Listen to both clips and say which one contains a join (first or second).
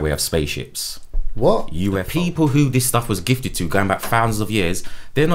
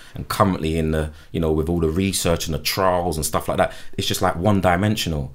first